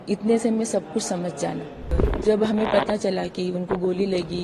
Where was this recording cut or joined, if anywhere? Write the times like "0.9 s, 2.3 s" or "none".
1.9 s